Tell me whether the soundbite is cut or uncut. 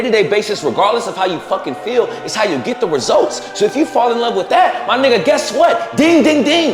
uncut